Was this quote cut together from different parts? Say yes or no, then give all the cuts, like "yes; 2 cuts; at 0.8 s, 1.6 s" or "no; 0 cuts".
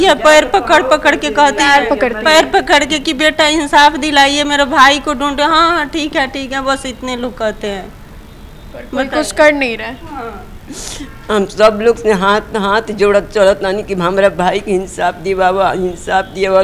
no; 0 cuts